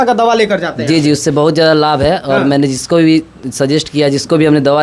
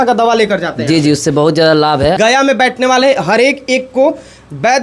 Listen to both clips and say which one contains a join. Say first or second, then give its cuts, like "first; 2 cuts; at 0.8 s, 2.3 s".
second; 1 cut; at 2.2 s